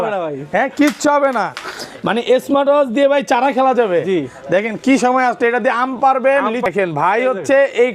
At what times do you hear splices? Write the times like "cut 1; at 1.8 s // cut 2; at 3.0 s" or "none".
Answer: cut 1; at 6.7 s